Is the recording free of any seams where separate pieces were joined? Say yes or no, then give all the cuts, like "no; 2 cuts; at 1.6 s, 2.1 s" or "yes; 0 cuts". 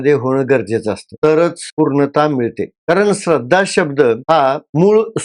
no; 1 cut; at 1.6 s